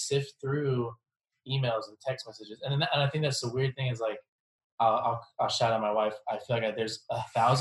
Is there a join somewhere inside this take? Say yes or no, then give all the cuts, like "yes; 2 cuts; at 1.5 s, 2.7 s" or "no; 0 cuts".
yes; 1 cut; at 6.2 s